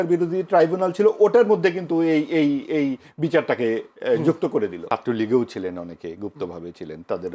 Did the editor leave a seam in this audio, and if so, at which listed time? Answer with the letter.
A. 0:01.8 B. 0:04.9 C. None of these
B